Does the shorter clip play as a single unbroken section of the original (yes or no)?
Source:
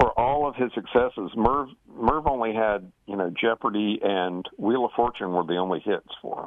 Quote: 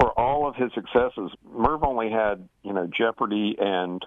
no